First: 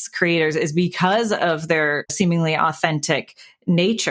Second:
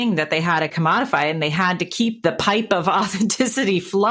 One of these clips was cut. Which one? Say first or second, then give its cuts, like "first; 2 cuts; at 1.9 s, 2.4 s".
first; 1 cut; at 2.0 s